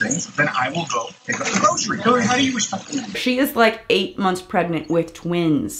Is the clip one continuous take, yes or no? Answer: no